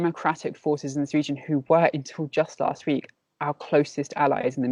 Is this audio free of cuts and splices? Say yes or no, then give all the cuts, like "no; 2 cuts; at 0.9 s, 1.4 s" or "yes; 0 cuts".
yes; 0 cuts